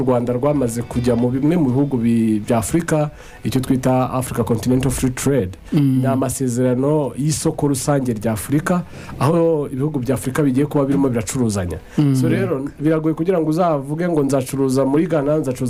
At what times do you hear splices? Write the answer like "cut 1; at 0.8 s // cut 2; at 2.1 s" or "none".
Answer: none